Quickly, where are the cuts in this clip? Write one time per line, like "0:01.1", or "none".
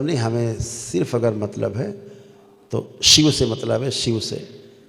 none